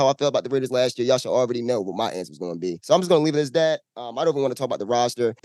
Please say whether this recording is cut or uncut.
uncut